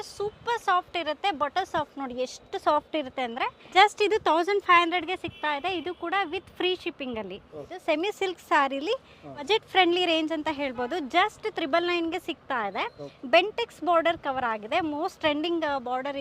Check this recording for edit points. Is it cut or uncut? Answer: cut